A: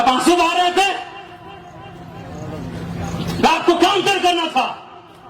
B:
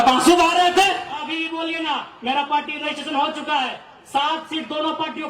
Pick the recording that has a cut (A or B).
B